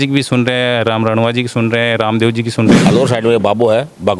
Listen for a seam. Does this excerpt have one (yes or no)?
yes